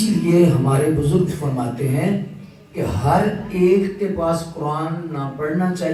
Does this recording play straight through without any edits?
yes; 0 cuts

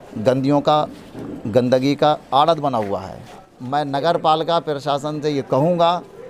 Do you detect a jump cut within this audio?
yes; 1 cut; at 3.5 s

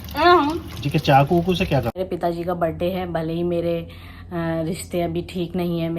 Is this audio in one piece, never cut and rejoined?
no; 1 cut; at 1.9 s

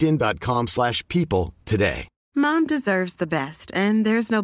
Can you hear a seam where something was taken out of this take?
yes; 1 cut; at 2.1 s

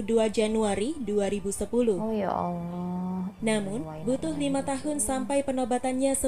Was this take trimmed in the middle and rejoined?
no; 0 cuts

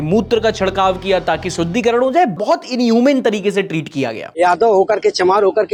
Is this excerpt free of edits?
yes; 0 cuts

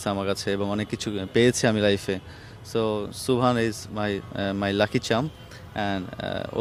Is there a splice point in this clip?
no; 0 cuts

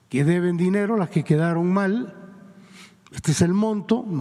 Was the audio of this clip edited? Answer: no; 0 cuts

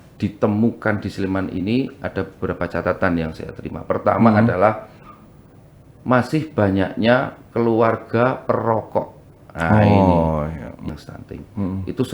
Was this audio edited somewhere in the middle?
yes; 1 cut; at 10.8 s

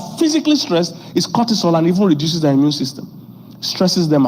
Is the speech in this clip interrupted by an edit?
no; 0 cuts

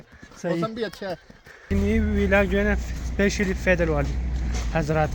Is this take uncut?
no; 1 cut; at 1.7 s

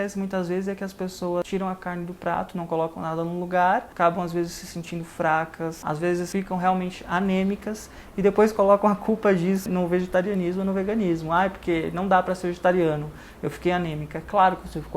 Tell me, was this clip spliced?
yes; 4 cuts; at 1.4 s, 3.9 s, 6.1 s, 9.6 s

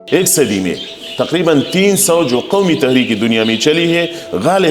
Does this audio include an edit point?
no; 0 cuts

